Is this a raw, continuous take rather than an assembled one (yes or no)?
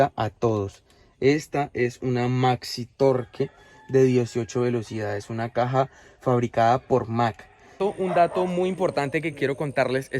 no